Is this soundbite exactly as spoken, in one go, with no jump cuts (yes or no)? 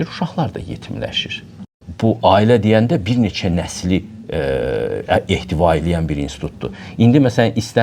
no